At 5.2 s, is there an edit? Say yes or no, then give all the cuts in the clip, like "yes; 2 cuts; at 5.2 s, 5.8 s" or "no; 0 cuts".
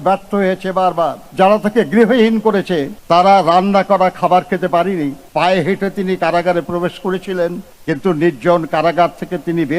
yes; 2 cuts; at 1.2 s, 5.2 s